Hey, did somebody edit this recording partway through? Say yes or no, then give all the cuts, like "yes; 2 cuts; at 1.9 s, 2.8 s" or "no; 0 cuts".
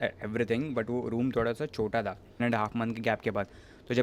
yes; 1 cut; at 2.4 s